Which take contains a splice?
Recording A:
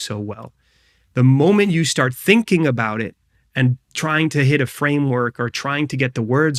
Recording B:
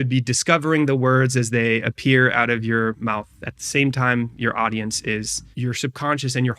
B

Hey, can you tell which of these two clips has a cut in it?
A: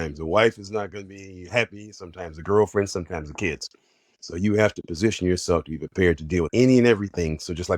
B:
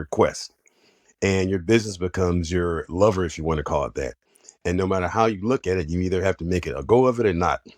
A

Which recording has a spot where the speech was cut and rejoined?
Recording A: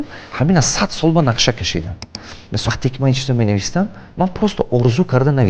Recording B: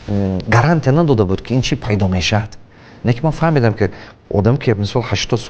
A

